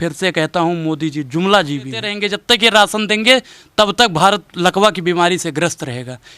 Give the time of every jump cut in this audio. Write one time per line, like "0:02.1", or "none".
0:02.2